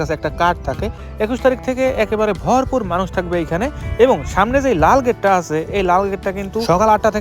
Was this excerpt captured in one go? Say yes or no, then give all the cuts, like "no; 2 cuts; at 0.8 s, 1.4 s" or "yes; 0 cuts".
no; 1 cut; at 1.0 s